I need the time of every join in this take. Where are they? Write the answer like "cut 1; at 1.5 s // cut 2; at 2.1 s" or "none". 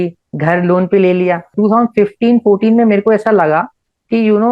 cut 1; at 1.5 s